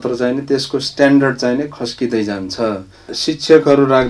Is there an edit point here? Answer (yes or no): yes